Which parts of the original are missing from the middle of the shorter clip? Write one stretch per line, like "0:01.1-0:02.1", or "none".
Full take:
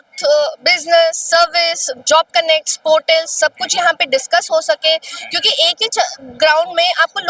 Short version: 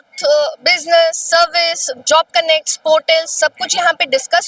none